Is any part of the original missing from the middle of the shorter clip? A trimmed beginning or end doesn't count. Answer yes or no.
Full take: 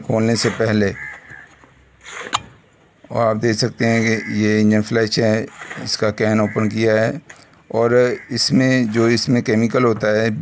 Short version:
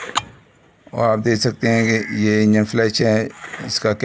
no